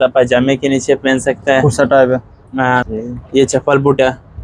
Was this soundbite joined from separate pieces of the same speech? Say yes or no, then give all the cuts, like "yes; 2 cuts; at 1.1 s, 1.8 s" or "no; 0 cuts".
yes; 1 cut; at 2.9 s